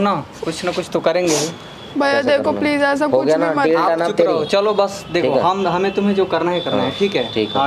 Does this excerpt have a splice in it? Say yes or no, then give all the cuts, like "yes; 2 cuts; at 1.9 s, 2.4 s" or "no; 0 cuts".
yes; 1 cut; at 1.8 s